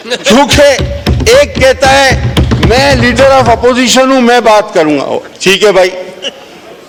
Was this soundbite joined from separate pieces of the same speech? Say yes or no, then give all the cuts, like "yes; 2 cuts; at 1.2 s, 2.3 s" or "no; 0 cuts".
no; 0 cuts